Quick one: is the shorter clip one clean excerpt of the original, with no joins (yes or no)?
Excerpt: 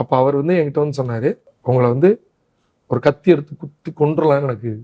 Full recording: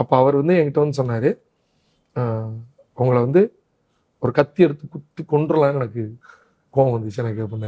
no